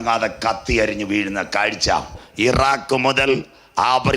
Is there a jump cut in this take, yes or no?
yes